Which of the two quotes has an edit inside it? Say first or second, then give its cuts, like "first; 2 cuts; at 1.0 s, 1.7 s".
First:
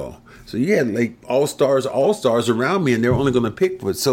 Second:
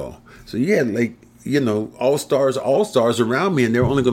first; 1 cut; at 1.2 s